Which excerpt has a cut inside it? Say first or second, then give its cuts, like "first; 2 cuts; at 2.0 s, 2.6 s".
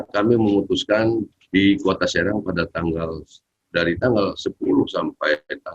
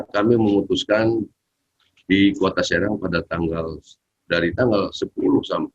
first; 1 cut; at 1.4 s